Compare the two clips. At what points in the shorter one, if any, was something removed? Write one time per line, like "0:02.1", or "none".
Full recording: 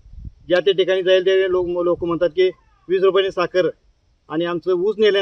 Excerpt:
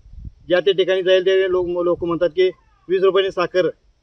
none